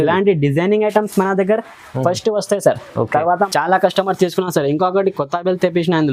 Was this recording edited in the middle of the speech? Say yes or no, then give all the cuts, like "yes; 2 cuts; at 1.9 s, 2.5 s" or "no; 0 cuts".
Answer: yes; 1 cut; at 3.5 s